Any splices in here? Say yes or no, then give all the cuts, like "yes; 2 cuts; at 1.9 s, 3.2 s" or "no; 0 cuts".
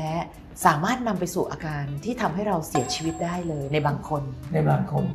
no; 0 cuts